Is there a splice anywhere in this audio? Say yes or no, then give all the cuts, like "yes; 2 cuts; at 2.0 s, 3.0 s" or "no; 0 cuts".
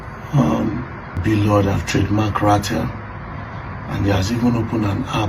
yes; 1 cut; at 1.2 s